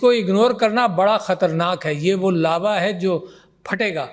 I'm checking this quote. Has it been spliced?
no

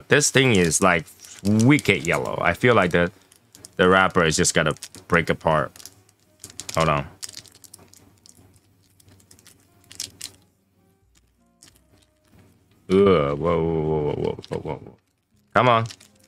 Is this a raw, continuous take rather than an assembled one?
yes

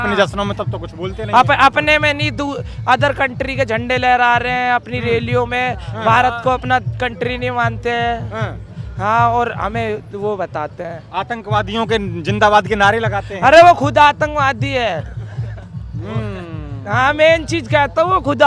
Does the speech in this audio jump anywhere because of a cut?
no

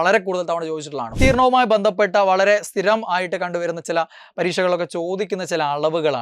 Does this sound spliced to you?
yes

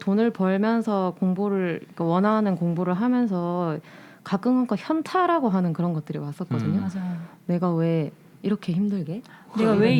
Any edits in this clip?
no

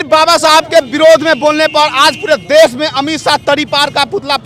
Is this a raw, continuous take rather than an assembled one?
yes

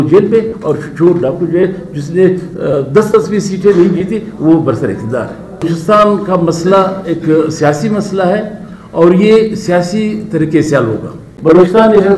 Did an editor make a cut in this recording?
yes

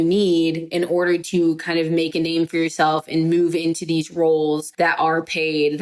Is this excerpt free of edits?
no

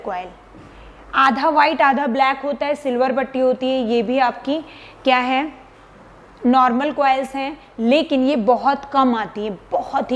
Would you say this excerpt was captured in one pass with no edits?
yes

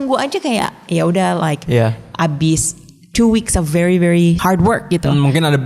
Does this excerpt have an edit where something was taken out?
yes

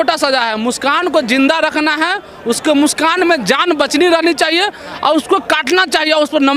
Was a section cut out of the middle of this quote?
no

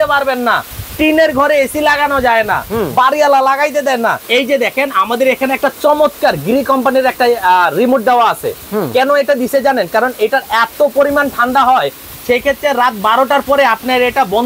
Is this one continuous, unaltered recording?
no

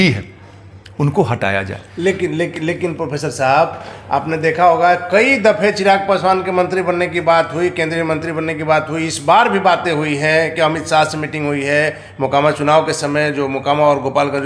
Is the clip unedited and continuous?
yes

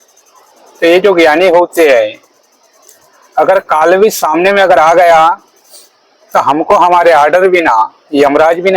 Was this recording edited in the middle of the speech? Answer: no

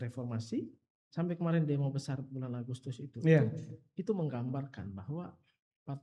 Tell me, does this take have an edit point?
yes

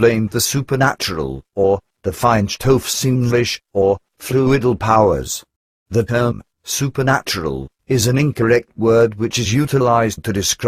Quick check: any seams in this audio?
yes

